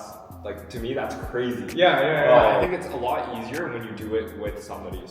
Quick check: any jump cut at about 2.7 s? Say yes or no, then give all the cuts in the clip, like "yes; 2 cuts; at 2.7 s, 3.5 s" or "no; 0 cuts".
yes; 1 cut; at 2.7 s